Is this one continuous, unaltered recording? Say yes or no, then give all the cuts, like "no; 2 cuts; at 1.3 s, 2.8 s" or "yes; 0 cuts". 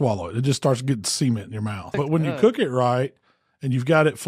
no; 1 cut; at 2.0 s